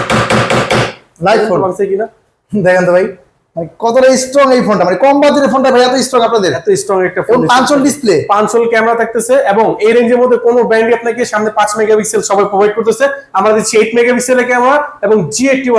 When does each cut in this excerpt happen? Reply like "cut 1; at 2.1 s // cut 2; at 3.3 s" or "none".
none